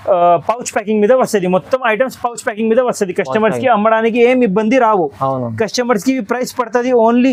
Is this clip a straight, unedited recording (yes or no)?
yes